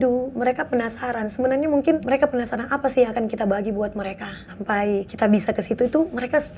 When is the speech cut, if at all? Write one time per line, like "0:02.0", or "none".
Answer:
0:02.0
0:04.7